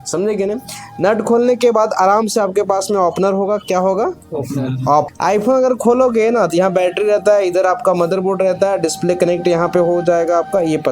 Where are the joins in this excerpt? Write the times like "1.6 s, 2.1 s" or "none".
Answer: 5.1 s